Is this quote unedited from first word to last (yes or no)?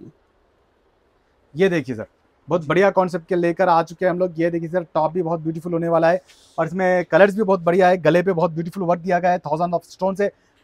yes